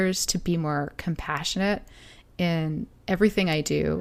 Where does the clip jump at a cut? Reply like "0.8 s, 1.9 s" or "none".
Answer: none